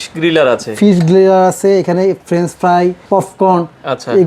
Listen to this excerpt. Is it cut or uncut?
cut